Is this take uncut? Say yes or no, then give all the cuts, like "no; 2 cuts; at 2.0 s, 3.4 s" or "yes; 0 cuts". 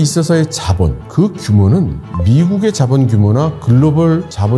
yes; 0 cuts